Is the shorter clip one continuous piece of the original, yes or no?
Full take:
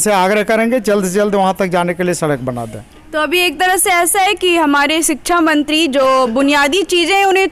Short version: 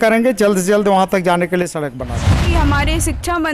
no